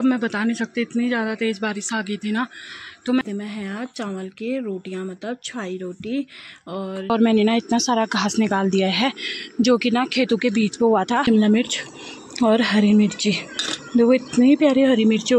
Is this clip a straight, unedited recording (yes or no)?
no